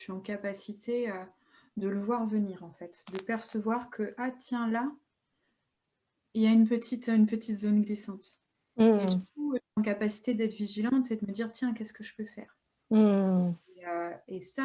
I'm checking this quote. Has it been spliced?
no; 0 cuts

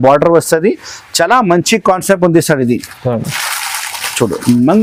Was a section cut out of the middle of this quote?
no; 0 cuts

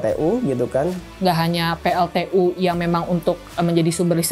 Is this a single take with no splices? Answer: no; 1 cut; at 1.1 s

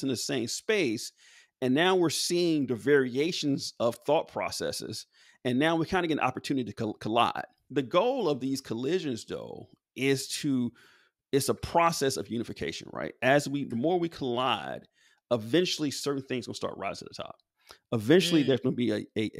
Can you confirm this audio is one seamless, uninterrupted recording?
no; 1 cut; at 7.5 s

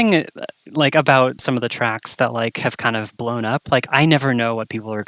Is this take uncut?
no; 1 cut; at 1.4 s

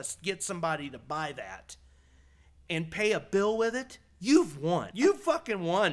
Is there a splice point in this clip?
yes; 1 cut; at 4.9 s

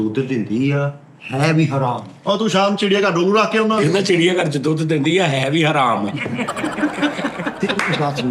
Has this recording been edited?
no; 0 cuts

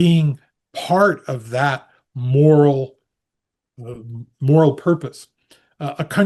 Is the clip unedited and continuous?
yes; 0 cuts

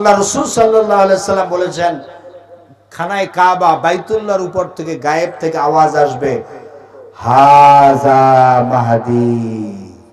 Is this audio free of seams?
yes; 0 cuts

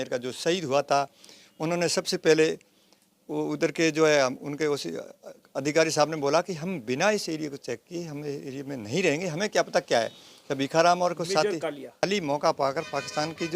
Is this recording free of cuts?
no; 1 cut; at 12.0 s

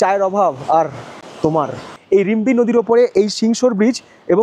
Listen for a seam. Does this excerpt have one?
yes; 1 cut; at 1.7 s

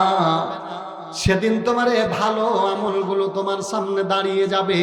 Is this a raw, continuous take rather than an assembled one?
yes; 0 cuts

